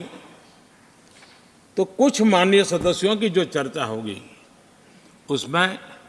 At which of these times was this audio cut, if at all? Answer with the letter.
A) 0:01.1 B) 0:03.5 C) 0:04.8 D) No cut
D